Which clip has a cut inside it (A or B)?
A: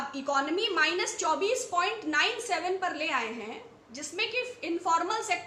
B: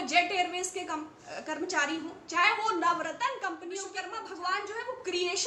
B